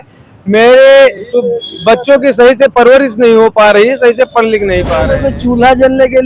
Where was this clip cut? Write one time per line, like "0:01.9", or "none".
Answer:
0:05.1